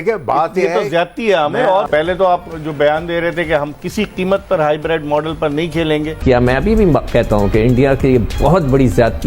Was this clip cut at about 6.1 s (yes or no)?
yes